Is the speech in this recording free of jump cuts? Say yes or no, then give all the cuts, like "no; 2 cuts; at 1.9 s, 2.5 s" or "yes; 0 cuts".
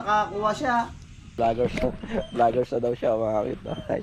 no; 1 cut; at 1.4 s